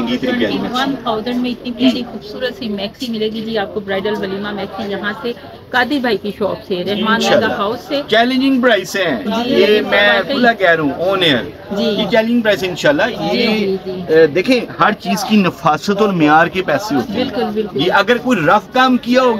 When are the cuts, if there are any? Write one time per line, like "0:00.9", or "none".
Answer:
none

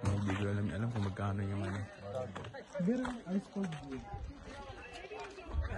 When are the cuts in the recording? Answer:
0:04.5

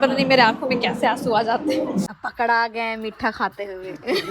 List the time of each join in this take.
0:02.1

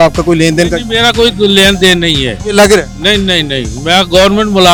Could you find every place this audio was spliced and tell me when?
none

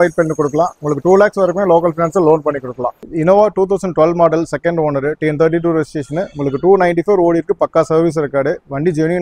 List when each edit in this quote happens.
none

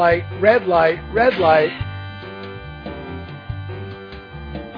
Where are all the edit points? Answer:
none

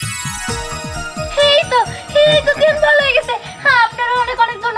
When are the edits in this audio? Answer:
none

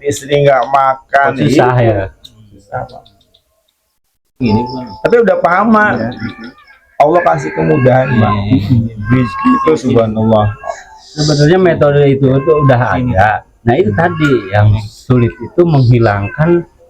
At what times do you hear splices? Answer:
none

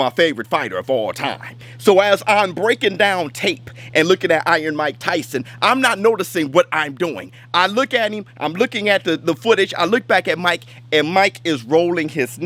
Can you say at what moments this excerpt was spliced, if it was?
none

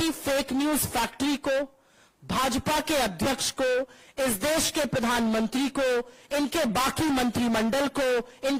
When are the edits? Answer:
none

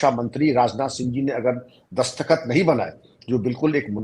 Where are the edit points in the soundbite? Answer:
none

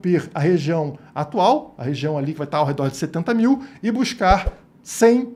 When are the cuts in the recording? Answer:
none

